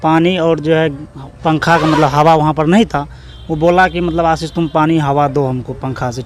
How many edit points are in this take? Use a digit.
0